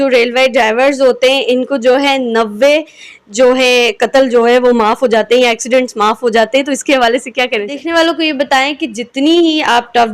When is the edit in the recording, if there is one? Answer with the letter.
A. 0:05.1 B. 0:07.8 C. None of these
B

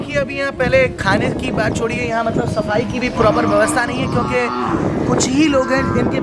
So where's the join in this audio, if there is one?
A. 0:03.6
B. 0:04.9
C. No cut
C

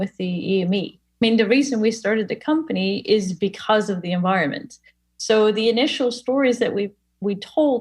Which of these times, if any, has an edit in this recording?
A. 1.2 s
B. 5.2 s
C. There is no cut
A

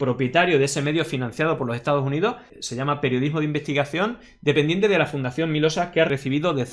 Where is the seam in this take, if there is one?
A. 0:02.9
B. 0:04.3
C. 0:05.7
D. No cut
D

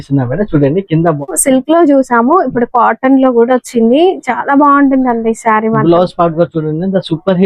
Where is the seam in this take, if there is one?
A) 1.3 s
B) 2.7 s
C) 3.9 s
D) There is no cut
A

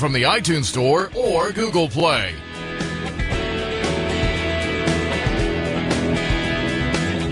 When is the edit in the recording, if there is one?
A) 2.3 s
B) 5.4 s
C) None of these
A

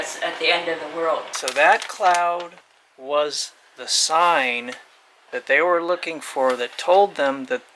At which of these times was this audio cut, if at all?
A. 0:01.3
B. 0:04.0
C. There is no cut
A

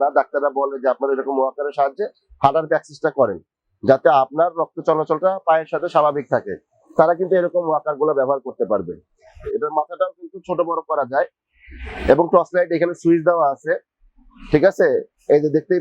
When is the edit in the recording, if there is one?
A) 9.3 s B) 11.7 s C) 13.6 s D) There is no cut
A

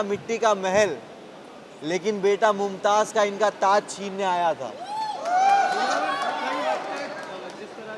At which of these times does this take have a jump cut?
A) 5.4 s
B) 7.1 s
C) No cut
C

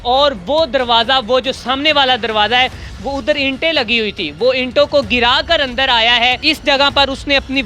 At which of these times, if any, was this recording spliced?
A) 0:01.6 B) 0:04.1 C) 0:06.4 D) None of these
C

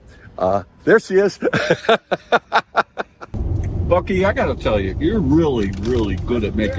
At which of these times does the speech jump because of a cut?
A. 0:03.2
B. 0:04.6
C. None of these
A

